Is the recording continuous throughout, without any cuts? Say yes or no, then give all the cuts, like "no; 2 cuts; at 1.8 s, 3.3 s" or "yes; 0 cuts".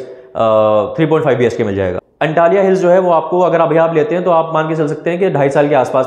no; 1 cut; at 2.0 s